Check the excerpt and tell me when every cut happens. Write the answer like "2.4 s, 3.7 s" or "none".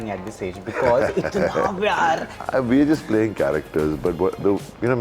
2.3 s